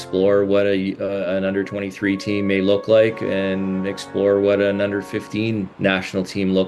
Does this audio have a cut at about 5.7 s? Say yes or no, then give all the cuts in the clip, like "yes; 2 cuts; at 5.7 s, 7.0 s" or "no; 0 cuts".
yes; 1 cut; at 5.7 s